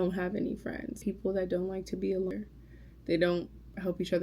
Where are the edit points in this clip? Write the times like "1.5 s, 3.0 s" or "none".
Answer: 1.0 s, 2.3 s

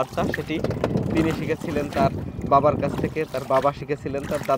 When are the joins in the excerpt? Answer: none

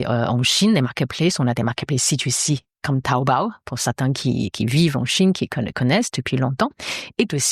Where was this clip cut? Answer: none

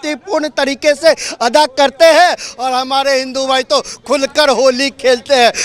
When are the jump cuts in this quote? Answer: none

